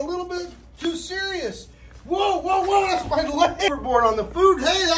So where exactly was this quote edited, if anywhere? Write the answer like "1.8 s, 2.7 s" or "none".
3.8 s